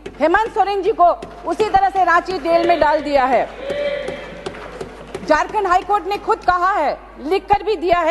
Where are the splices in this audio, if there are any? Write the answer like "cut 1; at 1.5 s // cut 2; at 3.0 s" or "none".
none